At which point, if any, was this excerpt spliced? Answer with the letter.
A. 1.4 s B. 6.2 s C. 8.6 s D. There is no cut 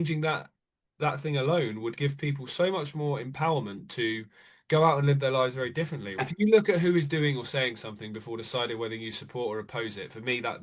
B